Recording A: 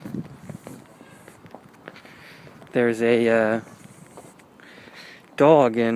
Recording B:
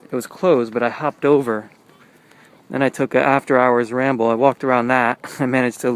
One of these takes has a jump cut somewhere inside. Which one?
B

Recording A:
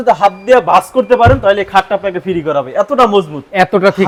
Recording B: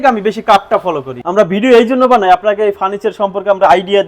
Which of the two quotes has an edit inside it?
B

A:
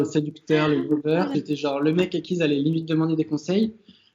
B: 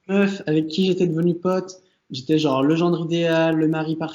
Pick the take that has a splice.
A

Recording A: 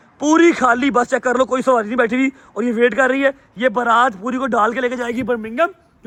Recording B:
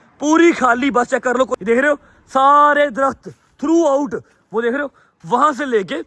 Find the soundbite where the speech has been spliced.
B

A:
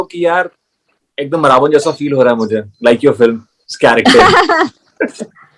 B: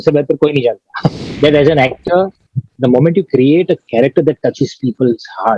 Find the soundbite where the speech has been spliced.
B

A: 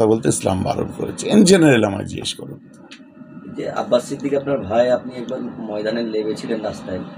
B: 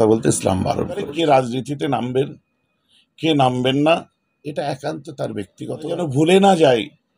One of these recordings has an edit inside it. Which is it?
B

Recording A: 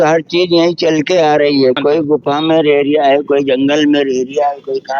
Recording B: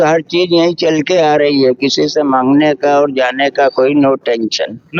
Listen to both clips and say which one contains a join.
A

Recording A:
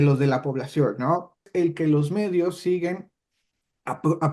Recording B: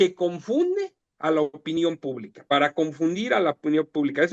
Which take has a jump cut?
A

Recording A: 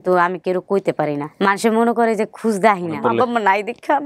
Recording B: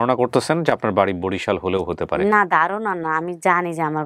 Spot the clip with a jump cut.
A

